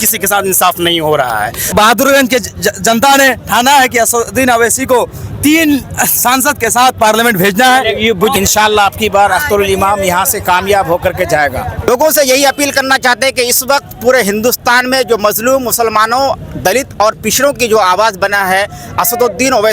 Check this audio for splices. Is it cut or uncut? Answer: cut